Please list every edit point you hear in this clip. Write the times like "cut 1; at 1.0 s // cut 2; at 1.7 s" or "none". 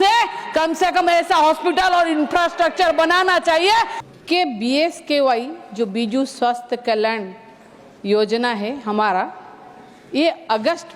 cut 1; at 4.0 s